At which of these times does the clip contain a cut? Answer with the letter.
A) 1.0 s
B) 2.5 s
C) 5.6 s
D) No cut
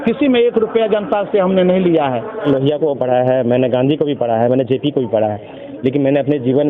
B